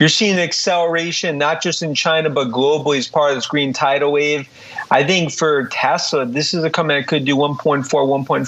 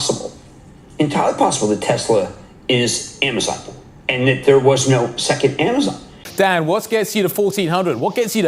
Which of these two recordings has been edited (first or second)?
second